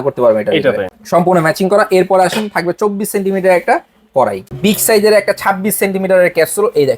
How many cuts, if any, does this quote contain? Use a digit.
2